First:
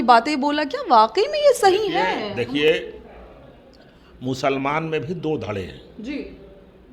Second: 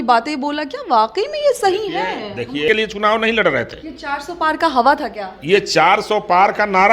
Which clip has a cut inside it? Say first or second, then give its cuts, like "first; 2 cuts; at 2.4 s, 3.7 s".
second; 1 cut; at 2.7 s